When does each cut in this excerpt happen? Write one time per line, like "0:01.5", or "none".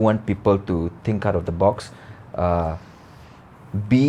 none

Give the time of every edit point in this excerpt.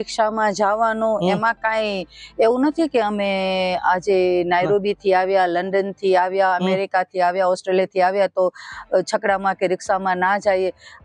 none

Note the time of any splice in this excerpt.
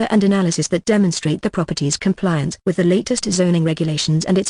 0:00.9

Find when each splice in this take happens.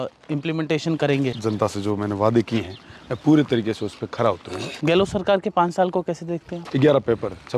0:01.4
0:04.7
0:06.5

